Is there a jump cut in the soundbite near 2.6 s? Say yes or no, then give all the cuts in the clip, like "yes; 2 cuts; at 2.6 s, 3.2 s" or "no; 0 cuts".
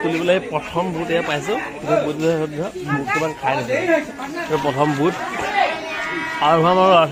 no; 0 cuts